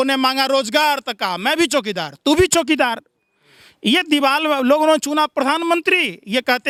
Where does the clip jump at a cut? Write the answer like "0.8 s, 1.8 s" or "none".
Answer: none